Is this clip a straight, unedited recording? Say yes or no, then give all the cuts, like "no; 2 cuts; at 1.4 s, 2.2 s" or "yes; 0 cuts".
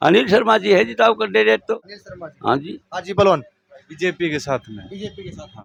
yes; 0 cuts